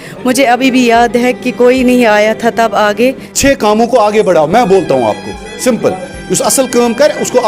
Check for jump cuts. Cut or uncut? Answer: cut